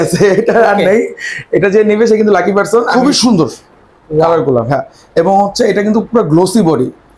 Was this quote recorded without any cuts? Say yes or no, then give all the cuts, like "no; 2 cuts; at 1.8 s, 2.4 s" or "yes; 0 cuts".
no; 1 cut; at 2.9 s